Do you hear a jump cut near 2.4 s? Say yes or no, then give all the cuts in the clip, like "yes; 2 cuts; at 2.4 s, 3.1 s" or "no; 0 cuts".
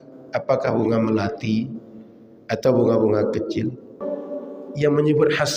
no; 1 cut; at 4.0 s